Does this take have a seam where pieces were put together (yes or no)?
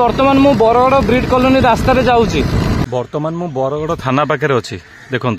yes